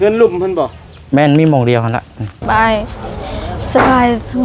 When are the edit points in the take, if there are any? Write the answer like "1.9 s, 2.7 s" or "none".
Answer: 2.4 s